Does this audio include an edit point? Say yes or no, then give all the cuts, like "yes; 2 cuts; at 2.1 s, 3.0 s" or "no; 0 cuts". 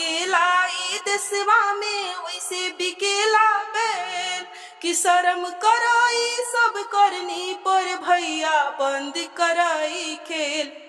no; 0 cuts